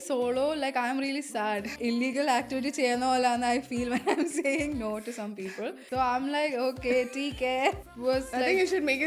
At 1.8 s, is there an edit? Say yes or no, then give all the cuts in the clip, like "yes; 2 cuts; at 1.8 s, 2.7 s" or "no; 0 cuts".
yes; 3 cuts; at 1.8 s, 5.8 s, 7.9 s